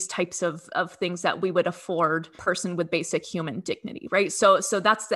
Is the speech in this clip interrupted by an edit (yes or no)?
yes